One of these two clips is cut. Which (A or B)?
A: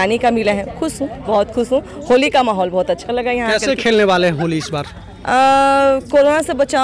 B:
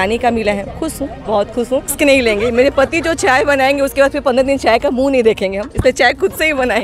B